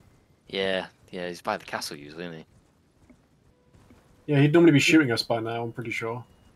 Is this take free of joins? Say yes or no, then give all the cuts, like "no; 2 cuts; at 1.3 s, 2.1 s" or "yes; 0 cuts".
no; 1 cut; at 3.5 s